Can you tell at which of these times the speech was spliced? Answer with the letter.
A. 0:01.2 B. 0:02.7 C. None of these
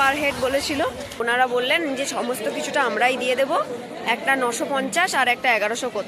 A